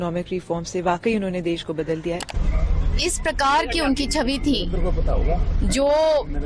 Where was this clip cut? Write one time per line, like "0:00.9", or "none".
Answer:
0:02.3